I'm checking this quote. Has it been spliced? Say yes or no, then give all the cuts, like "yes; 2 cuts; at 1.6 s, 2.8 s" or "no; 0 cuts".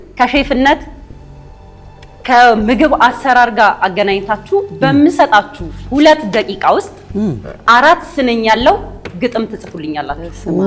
no; 0 cuts